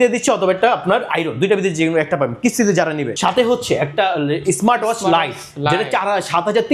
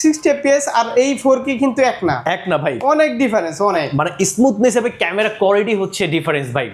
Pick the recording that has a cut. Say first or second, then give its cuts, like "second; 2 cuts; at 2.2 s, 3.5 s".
first; 1 cut; at 3.1 s